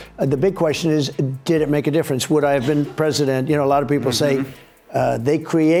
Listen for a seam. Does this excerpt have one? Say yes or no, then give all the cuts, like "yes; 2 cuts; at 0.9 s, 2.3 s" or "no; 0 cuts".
no; 0 cuts